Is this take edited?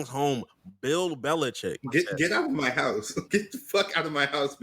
yes; 2 cuts; at 1.8 s, 3.2 s

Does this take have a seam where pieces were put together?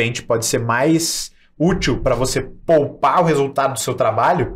no; 0 cuts

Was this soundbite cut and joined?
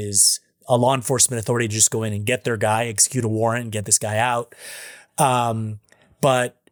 no; 0 cuts

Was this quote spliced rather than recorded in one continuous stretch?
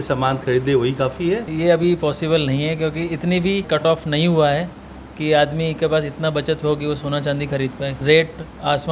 yes; 3 cuts; at 1.5 s, 3.7 s, 8.0 s

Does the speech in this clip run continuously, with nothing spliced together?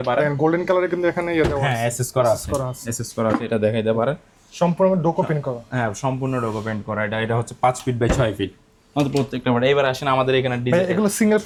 yes; 0 cuts

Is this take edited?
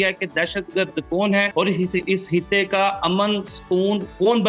yes; 1 cut; at 1.5 s

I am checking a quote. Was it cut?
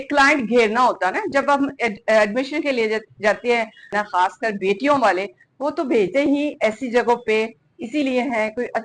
yes; 1 cut; at 3.9 s

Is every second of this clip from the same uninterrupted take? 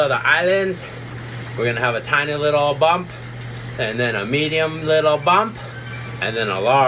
yes; 0 cuts

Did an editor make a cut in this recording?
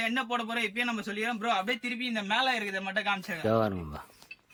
no; 0 cuts

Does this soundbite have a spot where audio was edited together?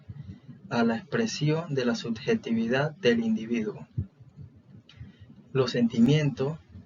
no; 0 cuts

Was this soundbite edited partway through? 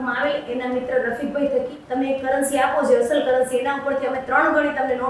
yes; 1 cut; at 1.8 s

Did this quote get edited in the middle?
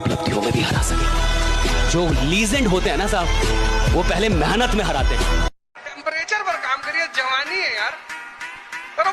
yes; 1 cut; at 5.6 s

